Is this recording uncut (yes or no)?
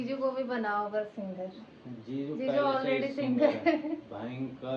yes